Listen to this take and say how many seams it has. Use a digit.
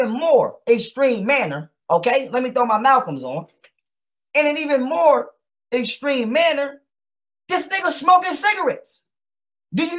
0